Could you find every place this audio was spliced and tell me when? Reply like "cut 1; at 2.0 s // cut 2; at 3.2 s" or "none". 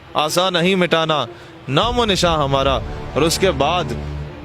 none